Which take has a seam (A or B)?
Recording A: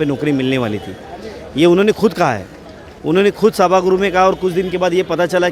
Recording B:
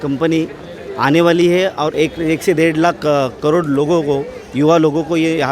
B